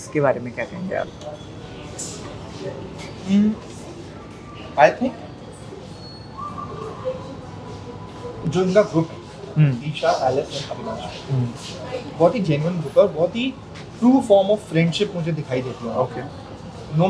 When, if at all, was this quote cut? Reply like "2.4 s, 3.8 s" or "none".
none

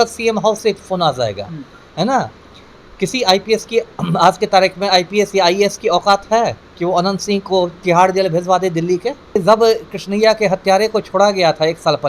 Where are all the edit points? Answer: 9.4 s

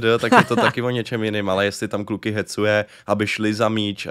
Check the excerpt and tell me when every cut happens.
none

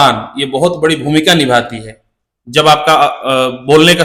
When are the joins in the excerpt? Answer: none

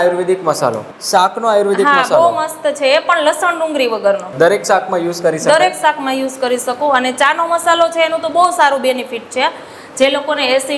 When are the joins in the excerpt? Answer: 0.9 s, 4.3 s

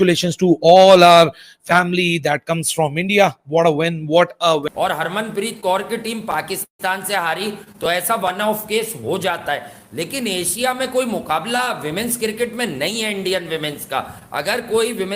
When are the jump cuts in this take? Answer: 4.7 s

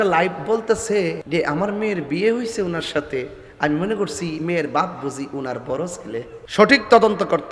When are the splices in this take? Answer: 1.2 s, 6.4 s

